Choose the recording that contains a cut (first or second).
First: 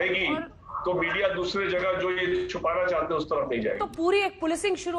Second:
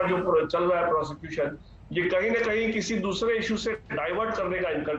first